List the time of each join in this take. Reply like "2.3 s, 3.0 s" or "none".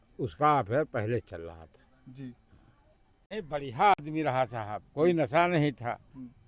3.3 s